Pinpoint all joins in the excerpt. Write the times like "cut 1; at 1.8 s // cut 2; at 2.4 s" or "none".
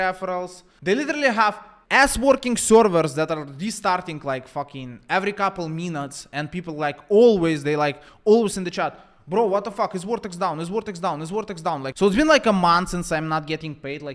cut 1; at 11.9 s